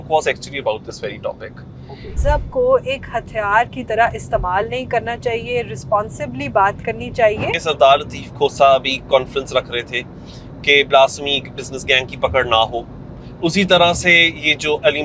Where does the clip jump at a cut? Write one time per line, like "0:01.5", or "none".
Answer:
0:02.2
0:07.5

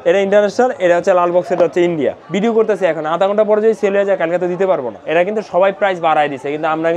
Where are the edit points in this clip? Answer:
0:02.2
0:04.9

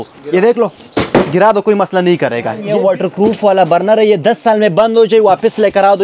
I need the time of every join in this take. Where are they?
0:02.6

